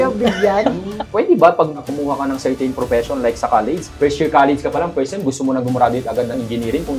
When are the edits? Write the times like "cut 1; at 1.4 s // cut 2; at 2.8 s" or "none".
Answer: cut 1; at 0.9 s // cut 2; at 1.9 s // cut 3; at 3.9 s